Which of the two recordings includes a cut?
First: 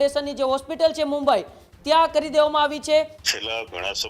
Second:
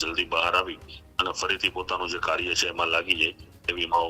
first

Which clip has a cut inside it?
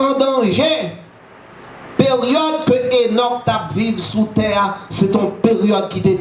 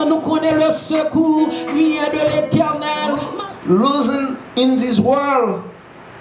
second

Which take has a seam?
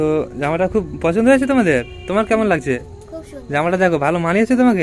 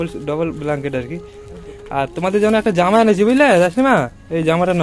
second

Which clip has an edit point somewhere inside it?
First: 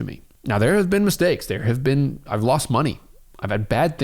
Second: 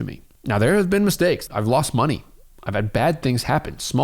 second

